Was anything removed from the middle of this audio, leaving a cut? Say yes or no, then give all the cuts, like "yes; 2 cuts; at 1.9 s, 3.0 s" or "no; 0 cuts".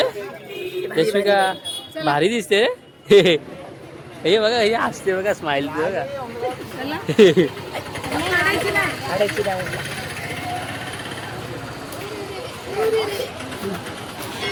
no; 0 cuts